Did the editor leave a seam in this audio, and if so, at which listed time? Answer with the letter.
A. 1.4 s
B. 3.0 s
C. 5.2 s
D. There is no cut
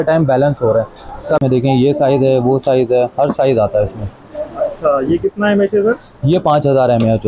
A